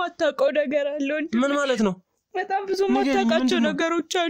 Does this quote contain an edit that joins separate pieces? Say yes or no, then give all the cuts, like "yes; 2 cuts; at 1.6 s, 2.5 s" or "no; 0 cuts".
no; 0 cuts